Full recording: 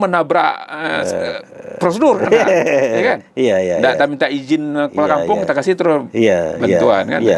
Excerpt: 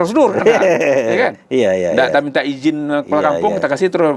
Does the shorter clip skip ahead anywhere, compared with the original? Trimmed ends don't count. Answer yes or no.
no